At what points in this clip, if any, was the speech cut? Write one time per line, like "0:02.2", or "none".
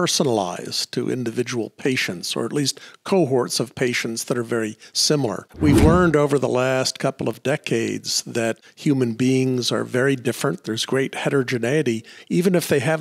0:05.5
0:08.7